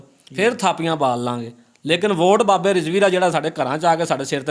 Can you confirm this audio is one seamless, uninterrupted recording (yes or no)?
yes